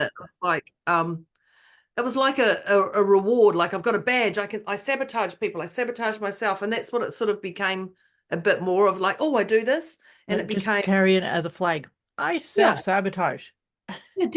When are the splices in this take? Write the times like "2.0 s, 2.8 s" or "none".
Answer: none